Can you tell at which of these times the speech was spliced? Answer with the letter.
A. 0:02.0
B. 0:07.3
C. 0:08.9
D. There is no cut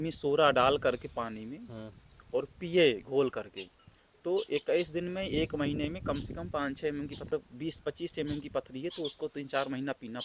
B